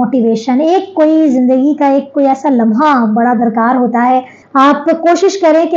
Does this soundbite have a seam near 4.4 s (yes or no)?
yes